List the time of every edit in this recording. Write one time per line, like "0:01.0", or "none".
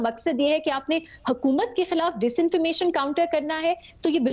none

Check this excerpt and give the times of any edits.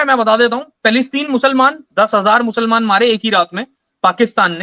none

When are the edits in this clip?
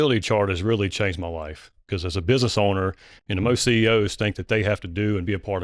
0:01.7

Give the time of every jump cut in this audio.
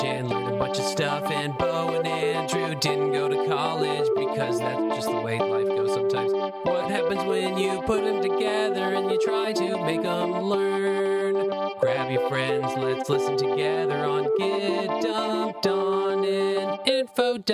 none

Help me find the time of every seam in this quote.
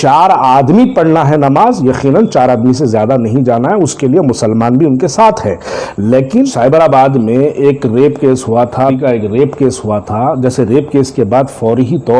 0:06.5
0:09.0

